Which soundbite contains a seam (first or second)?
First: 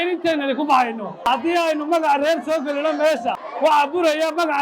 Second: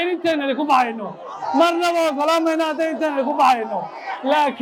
first